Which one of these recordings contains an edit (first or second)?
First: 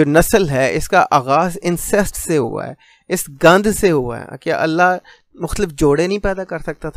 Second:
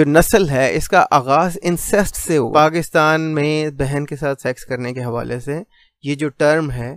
second